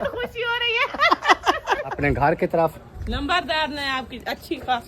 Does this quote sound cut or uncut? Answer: cut